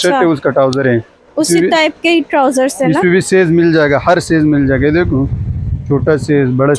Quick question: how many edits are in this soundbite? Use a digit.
0